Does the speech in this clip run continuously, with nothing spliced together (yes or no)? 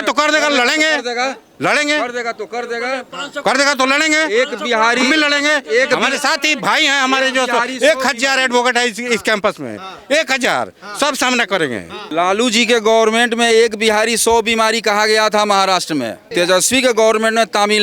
no